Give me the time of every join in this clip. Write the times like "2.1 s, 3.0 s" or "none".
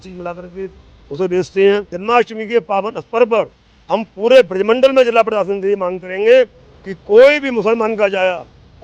1.9 s